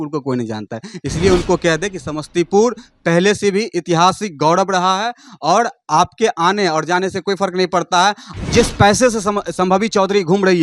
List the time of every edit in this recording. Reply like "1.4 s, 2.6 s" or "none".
8.3 s

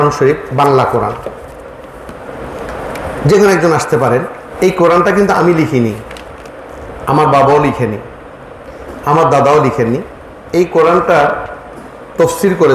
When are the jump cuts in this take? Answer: 4.4 s

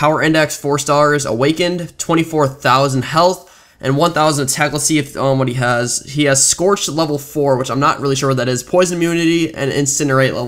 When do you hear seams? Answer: 7.9 s

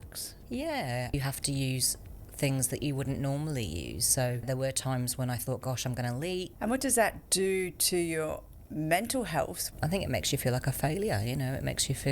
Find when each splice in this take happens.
1.1 s, 4.4 s, 6.5 s, 7.2 s, 9.6 s

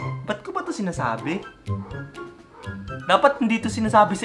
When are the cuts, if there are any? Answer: none

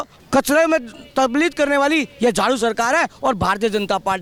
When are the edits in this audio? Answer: none

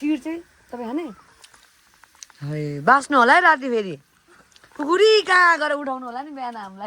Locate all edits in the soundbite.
none

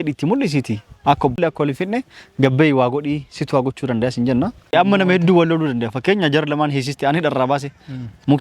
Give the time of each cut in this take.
1.4 s, 4.7 s

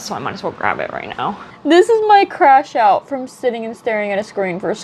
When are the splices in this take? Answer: 1.5 s

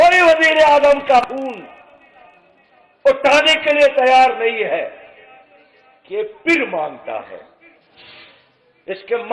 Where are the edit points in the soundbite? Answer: 1.2 s

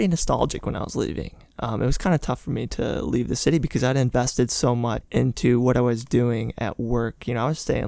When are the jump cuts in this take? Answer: none

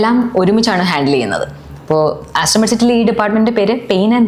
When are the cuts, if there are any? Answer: none

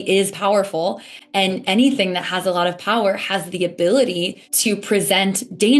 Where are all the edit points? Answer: 4.4 s

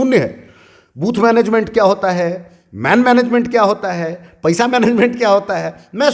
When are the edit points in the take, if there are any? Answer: none

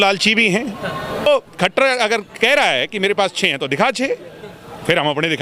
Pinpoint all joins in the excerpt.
1.3 s

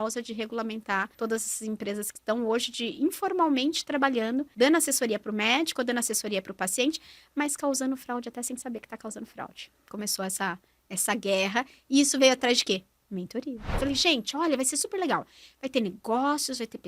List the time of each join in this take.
1.1 s, 4.5 s, 9.9 s, 13.8 s

